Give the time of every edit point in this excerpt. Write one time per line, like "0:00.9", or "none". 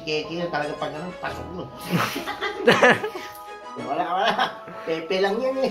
0:03.8